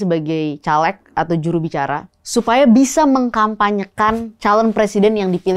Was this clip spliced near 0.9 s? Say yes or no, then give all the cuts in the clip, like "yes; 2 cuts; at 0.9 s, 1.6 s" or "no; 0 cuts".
no; 2 cuts; at 2.2 s, 4.3 s